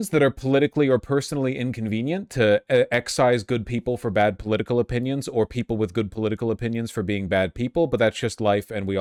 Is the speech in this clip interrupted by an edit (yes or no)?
no